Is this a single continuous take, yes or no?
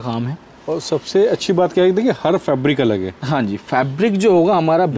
yes